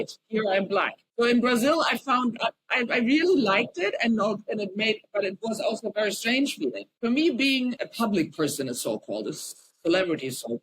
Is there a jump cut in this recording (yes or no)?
yes